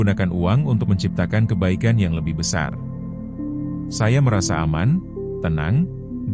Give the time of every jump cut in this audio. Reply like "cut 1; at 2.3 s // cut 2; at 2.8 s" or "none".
cut 1; at 3.0 s // cut 2; at 4.0 s